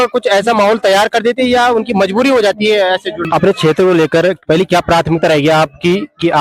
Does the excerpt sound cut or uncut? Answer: cut